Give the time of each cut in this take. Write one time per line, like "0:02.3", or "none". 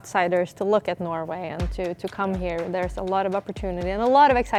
none